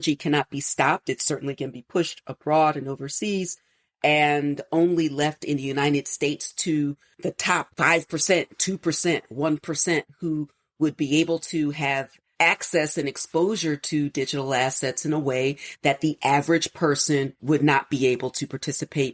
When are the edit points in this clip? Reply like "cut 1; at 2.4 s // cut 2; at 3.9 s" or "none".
none